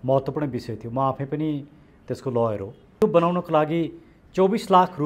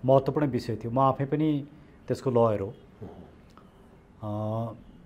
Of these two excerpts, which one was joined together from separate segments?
first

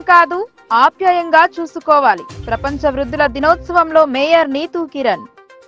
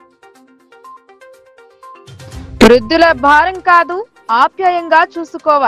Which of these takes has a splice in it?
second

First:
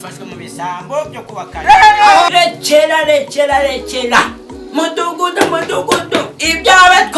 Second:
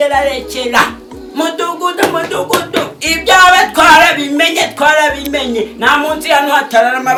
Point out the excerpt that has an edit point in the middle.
first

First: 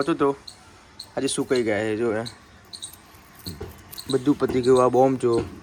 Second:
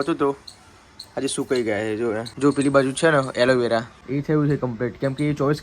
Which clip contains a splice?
second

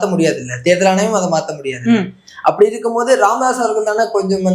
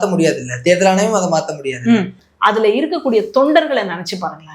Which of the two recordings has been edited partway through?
second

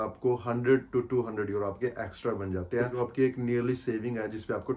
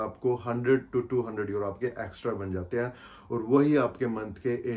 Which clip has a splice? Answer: first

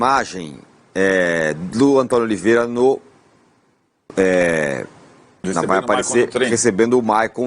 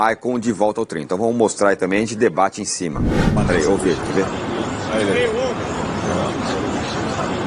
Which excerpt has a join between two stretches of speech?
second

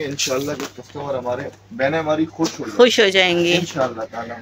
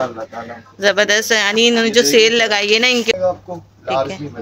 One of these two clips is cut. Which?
second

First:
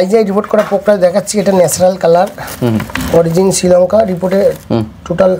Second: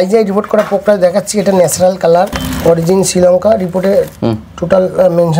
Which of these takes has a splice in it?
second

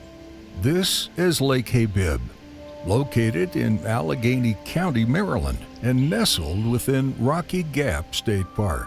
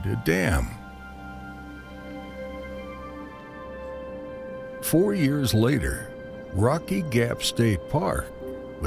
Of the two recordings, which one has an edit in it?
first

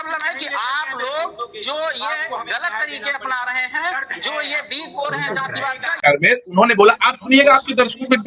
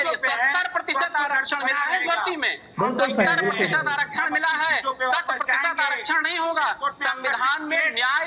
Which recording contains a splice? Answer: first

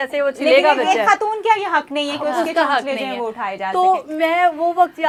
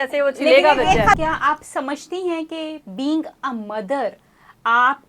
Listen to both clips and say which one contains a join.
second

